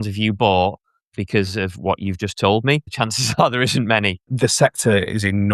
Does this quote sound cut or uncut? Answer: cut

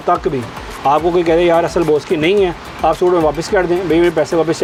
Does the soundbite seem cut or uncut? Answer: uncut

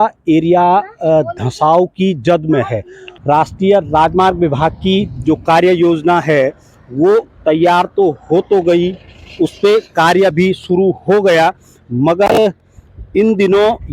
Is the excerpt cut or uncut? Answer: cut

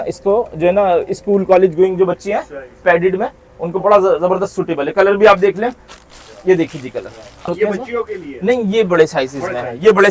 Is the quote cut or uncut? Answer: cut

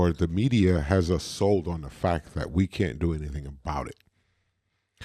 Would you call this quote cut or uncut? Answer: uncut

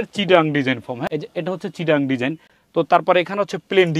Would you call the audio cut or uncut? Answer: uncut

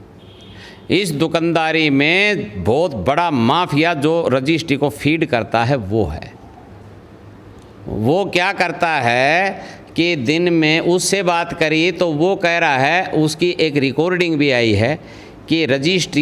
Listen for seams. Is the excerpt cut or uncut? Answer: uncut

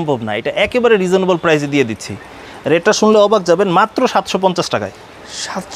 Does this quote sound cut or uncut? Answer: uncut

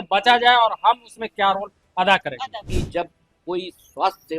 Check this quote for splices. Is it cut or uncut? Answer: cut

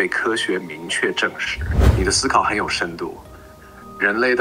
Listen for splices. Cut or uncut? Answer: cut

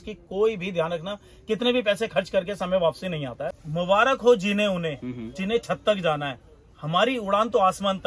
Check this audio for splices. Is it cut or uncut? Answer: cut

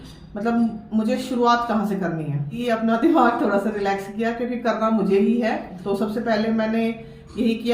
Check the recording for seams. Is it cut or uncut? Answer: cut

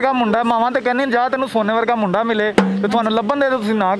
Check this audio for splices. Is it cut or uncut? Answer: uncut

